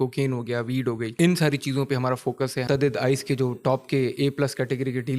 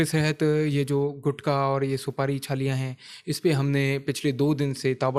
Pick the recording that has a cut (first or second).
first